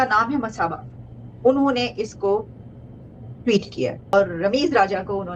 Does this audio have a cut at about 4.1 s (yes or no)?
yes